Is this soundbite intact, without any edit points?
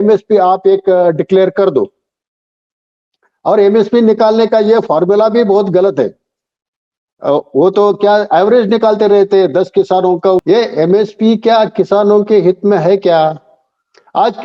no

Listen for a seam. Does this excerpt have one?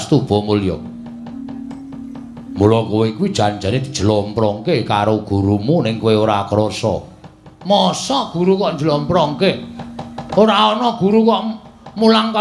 no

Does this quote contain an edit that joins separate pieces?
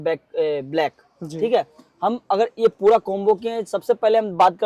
no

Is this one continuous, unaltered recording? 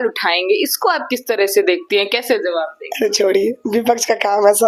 yes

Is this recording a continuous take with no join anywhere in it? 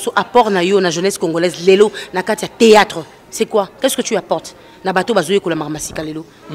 yes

